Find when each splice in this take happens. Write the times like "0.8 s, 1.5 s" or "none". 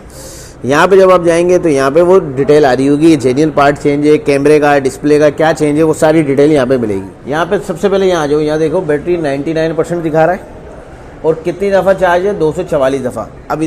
7.1 s